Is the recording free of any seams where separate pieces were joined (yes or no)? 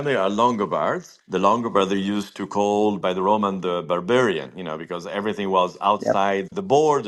yes